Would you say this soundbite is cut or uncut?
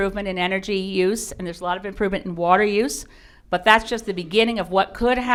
uncut